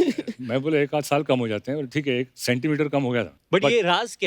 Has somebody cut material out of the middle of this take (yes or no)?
no